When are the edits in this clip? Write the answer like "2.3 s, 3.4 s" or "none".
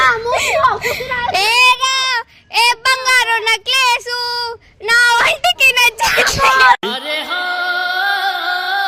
none